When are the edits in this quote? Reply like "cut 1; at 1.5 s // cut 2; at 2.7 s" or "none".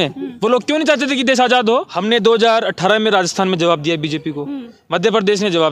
cut 1; at 1.9 s